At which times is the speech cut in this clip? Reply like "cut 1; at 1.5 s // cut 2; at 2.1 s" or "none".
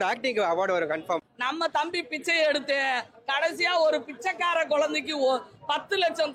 cut 1; at 1.2 s